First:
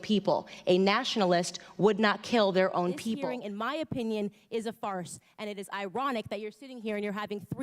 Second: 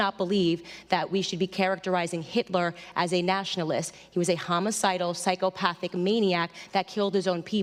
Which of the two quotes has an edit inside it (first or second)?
first